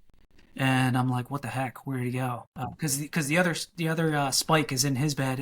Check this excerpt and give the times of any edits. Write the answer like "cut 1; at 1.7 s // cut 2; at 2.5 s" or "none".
cut 1; at 2.6 s